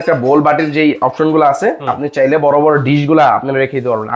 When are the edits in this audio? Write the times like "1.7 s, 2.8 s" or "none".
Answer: none